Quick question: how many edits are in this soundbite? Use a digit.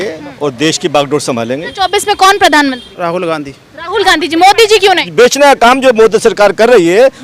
3